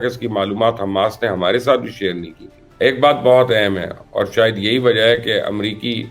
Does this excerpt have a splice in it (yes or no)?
no